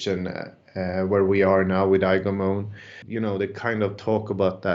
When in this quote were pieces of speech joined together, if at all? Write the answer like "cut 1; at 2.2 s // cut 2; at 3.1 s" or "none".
cut 1; at 2.9 s

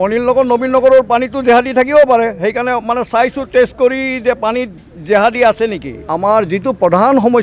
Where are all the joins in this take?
cut 1; at 6.0 s

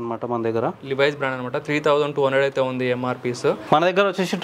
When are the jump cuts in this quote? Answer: none

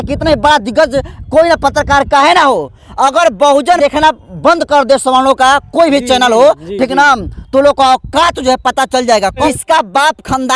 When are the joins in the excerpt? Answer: cut 1; at 9.4 s

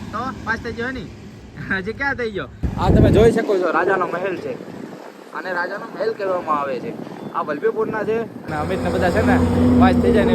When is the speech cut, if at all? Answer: cut 1; at 2.5 s // cut 2; at 8.5 s

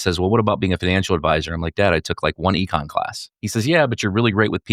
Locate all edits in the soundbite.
cut 1; at 3.3 s

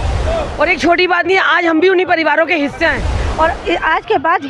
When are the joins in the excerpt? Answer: cut 1; at 3.2 s

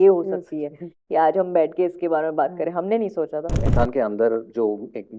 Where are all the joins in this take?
cut 1; at 3.6 s

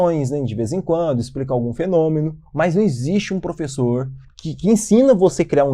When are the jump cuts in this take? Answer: none

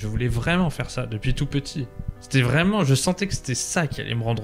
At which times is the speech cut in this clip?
none

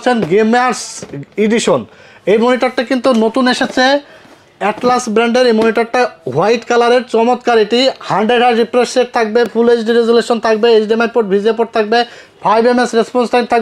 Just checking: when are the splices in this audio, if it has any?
none

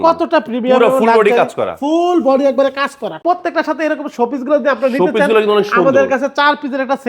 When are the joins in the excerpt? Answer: cut 1; at 3.2 s

